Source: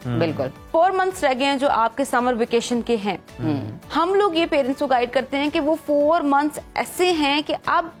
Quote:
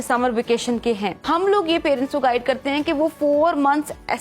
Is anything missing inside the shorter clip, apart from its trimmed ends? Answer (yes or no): yes